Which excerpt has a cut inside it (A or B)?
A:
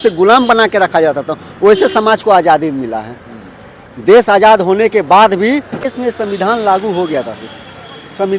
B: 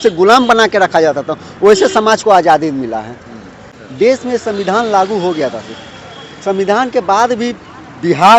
B